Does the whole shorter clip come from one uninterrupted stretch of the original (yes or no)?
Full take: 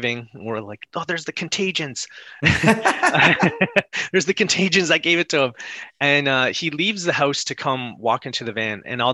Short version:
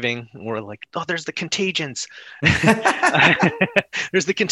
yes